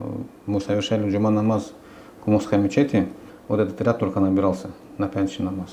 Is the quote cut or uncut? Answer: cut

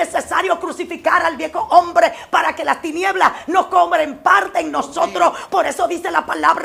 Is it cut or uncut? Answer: uncut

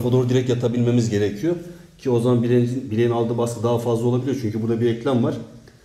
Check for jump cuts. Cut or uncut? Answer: uncut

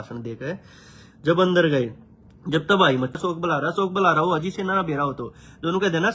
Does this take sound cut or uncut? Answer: cut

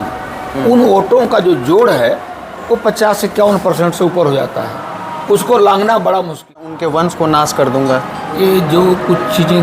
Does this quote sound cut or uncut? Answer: cut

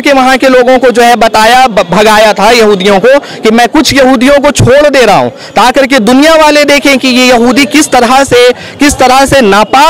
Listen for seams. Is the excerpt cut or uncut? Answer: uncut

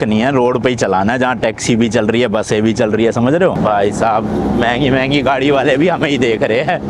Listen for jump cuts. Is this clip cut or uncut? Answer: cut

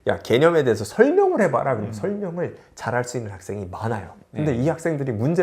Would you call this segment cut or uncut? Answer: cut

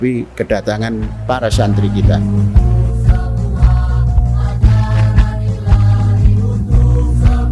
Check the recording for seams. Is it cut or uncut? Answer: cut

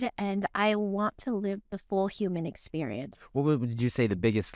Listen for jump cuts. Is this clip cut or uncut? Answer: cut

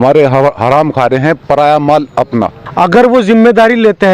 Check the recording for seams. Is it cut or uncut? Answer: cut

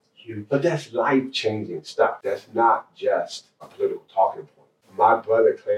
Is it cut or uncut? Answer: cut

